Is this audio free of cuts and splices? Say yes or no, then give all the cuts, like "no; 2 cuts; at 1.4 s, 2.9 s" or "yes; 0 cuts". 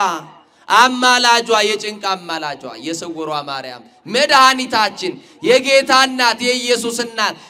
yes; 0 cuts